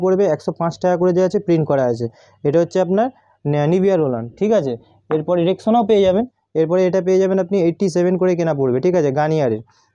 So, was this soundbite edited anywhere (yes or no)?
no